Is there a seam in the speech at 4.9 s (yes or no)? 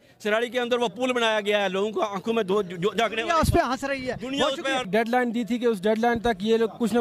yes